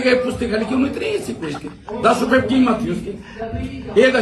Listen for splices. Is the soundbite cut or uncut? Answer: uncut